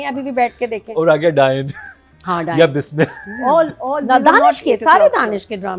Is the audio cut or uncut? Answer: uncut